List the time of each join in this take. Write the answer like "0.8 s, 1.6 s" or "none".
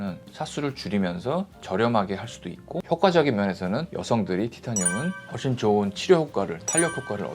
2.8 s